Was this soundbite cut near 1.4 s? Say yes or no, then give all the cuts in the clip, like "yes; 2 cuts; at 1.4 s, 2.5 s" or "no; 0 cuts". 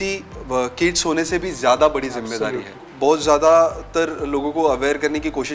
no; 1 cut; at 2.8 s